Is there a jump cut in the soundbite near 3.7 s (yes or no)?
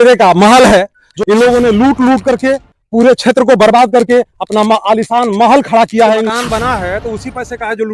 no